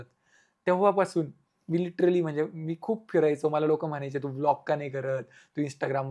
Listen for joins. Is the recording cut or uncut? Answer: uncut